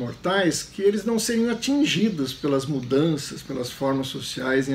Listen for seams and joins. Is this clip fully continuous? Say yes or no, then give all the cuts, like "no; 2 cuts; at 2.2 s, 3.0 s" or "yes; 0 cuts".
yes; 0 cuts